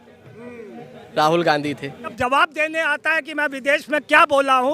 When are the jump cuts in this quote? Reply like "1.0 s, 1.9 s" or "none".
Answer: 2.1 s